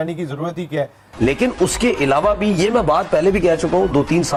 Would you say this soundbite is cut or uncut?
uncut